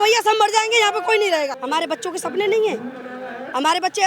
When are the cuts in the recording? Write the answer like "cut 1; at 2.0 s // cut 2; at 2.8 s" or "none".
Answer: cut 1; at 1.6 s